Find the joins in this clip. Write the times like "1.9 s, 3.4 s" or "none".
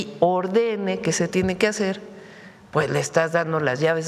none